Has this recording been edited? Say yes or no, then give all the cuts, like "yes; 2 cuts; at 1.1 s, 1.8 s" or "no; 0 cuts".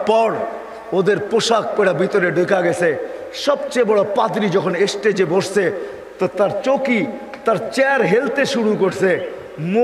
no; 0 cuts